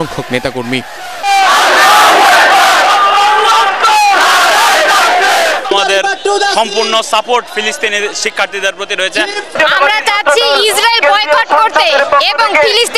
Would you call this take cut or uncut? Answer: uncut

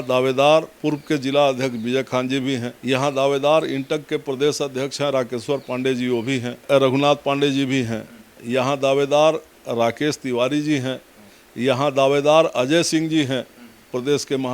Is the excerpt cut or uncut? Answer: uncut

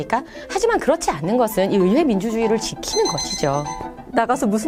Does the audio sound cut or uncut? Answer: uncut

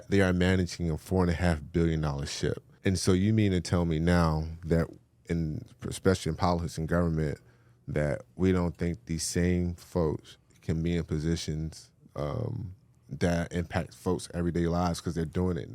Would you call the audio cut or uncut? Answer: cut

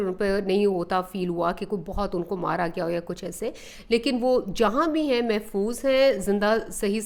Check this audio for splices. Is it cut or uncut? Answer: uncut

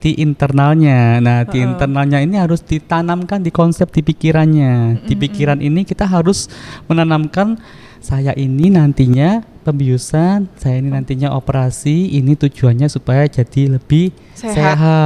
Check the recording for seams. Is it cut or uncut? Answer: uncut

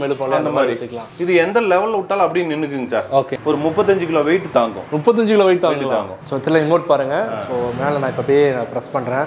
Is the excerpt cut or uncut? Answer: cut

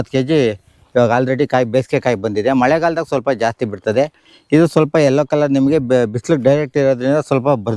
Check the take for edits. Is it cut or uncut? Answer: uncut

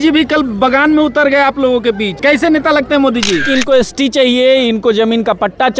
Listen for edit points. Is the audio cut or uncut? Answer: cut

